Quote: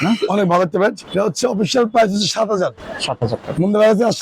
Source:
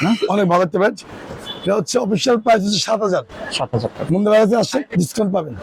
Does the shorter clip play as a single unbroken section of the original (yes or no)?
no